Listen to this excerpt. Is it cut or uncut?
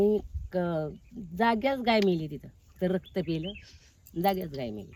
uncut